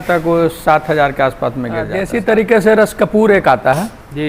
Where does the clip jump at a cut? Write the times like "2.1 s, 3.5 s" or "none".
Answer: 2.0 s